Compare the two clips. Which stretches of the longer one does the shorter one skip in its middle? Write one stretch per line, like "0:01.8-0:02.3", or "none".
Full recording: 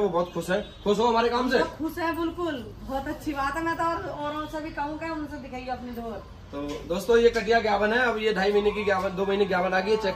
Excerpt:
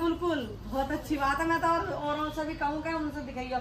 none